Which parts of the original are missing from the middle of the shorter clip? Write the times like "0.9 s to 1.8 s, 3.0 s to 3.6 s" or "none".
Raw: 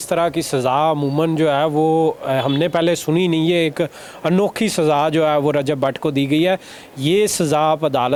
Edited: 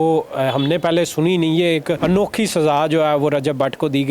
3.9 s to 4.2 s